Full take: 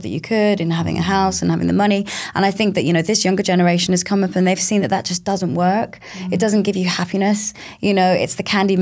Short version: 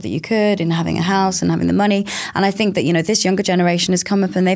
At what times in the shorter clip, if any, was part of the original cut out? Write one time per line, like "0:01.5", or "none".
none